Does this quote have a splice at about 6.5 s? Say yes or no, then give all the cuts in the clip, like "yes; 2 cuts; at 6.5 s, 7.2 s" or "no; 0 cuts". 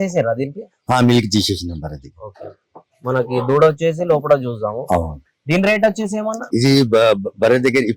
yes; 1 cut; at 6.5 s